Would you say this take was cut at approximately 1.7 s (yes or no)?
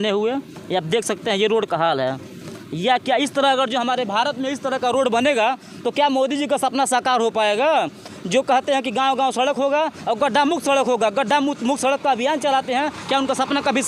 no